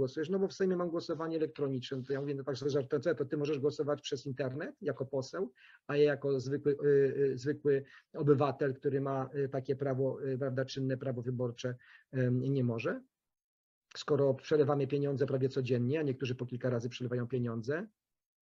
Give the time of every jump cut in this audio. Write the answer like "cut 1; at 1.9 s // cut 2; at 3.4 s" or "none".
none